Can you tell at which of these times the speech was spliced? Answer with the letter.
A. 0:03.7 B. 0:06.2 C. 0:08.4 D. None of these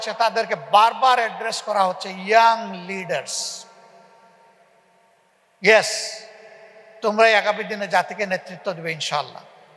D